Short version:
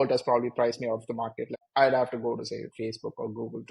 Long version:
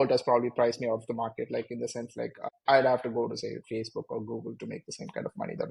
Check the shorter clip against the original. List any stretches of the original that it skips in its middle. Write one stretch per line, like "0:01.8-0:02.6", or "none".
0:01.6-0:02.5

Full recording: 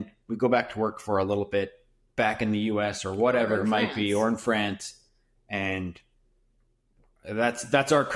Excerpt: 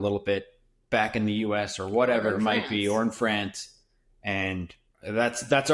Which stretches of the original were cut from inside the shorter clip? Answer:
0:06.1-0:07.1

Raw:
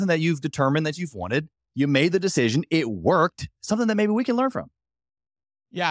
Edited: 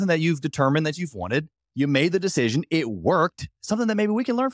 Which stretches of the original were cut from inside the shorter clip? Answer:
none

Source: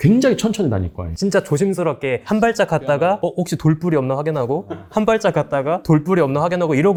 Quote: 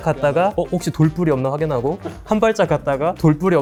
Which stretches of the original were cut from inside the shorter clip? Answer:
none

